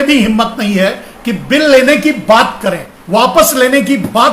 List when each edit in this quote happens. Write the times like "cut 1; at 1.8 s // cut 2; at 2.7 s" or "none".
cut 1; at 2.9 s